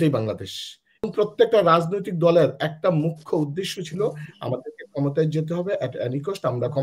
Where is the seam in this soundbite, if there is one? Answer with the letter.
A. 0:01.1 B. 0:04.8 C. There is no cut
A